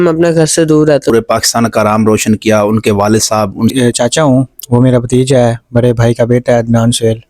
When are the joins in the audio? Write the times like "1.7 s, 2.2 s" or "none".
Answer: 1.1 s, 3.7 s